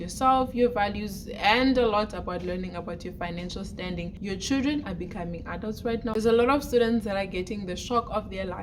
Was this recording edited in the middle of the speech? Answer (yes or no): yes